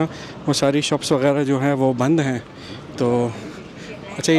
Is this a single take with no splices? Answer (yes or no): yes